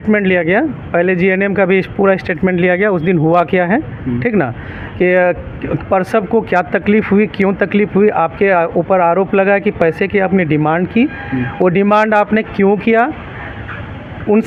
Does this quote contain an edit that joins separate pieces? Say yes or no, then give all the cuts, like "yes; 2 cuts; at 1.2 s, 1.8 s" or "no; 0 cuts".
no; 0 cuts